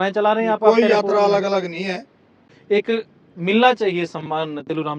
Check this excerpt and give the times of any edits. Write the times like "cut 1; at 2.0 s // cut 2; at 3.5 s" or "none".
cut 1; at 2.6 s